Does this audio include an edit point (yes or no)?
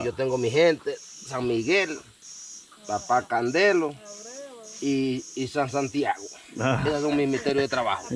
no